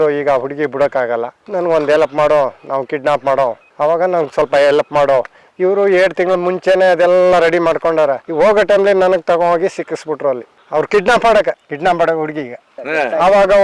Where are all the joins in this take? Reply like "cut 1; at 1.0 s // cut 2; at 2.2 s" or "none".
none